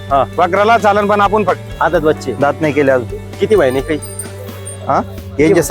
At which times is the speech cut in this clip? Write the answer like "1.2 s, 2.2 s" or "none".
1.6 s